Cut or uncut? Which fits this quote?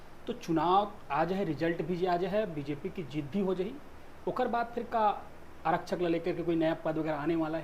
uncut